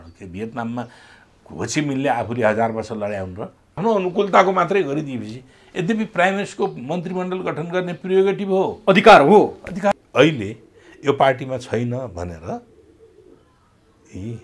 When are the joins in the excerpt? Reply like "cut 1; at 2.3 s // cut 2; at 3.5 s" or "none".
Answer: cut 1; at 3.8 s // cut 2; at 9.9 s

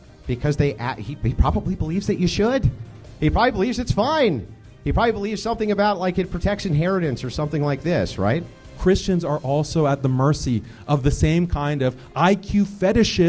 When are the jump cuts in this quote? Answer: cut 1; at 8.7 s

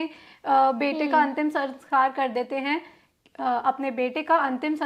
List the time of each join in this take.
none

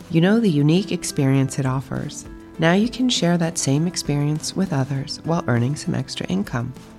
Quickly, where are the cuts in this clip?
none

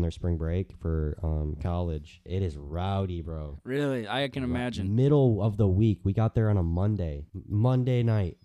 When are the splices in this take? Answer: cut 1; at 2.3 s

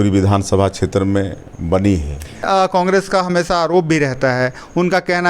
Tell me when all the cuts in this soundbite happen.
cut 1; at 2.4 s

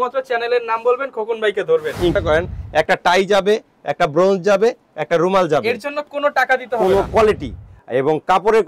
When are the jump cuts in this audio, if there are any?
cut 1; at 2.2 s // cut 2; at 7.1 s

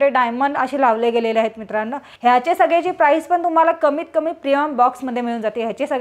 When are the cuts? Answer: cut 1; at 2.0 s

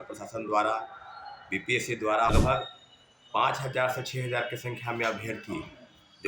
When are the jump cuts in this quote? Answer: cut 1; at 2.3 s

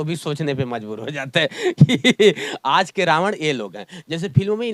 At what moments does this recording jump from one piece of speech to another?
none

